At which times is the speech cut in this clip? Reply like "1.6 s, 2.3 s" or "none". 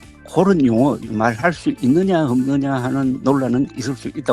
1.0 s